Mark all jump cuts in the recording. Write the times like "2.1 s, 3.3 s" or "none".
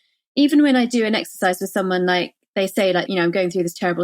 3.1 s